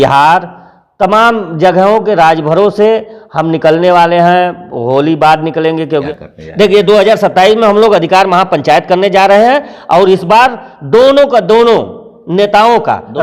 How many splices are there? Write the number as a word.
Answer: one